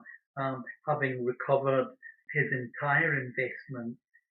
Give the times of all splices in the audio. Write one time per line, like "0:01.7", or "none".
0:02.2